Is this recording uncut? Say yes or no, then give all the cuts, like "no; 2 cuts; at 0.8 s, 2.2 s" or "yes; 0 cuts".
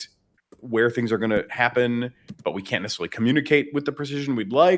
yes; 0 cuts